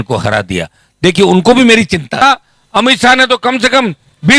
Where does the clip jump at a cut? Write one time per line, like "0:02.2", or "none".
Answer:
0:02.2